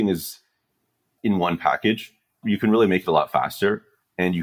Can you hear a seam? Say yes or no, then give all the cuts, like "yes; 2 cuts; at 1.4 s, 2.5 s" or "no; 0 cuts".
yes; 2 cuts; at 1.1 s, 2.4 s